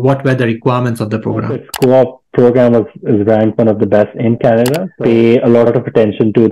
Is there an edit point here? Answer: yes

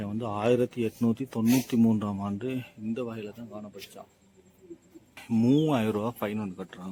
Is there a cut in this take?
yes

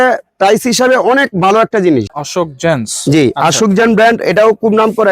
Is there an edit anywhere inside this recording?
yes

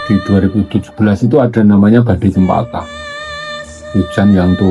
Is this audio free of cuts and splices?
yes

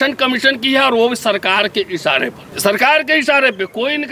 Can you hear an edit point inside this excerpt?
yes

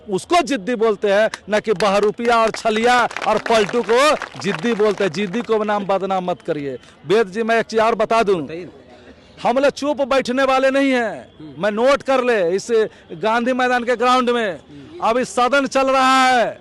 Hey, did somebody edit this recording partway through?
no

